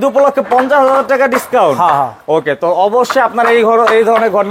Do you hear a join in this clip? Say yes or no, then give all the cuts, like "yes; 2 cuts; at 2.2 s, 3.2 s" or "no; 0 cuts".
no; 0 cuts